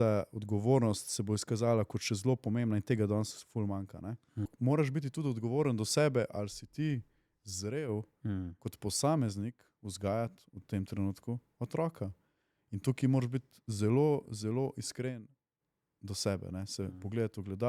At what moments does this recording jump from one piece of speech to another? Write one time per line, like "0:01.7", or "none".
0:04.5